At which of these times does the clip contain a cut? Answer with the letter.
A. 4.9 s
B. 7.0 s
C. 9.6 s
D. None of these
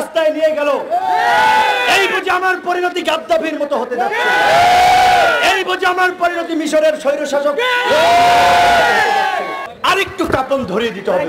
C